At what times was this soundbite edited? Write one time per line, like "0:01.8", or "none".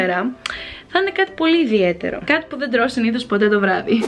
none